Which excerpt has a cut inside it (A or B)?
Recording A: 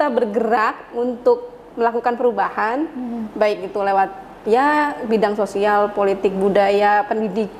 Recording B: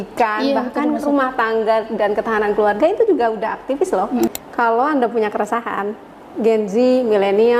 B